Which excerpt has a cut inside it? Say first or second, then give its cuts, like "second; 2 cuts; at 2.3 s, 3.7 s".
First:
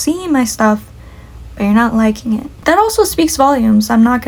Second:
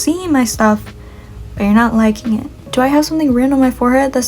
second; 1 cut; at 2.5 s